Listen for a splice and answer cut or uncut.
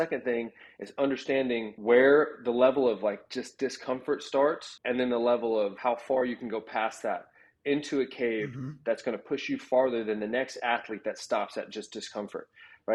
uncut